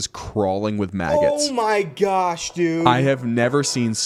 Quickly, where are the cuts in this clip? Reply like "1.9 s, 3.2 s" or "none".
none